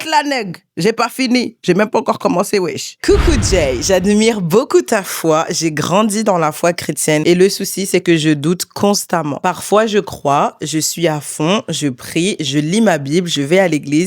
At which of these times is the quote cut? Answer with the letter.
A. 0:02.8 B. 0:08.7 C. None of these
A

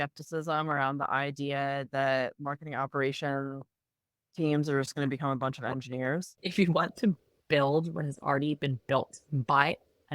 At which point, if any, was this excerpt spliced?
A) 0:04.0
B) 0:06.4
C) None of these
B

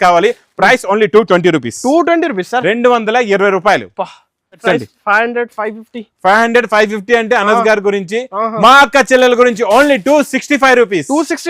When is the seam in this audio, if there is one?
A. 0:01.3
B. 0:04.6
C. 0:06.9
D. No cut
B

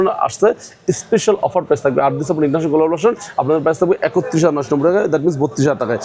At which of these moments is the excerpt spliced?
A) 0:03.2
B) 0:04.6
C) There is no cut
C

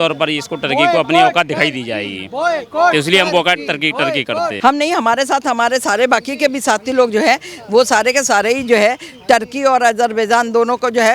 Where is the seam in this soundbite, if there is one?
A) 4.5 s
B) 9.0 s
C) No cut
A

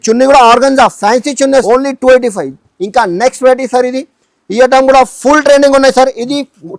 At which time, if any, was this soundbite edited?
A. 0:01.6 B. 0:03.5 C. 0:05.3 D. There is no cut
A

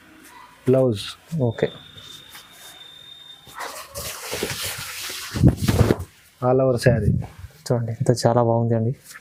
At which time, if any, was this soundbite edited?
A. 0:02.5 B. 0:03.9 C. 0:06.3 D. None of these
D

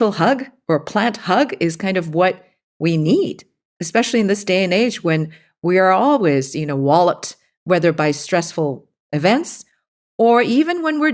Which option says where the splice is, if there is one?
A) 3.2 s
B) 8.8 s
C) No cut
C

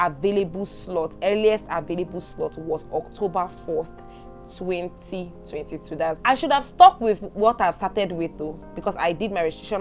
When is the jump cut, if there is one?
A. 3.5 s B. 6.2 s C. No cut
B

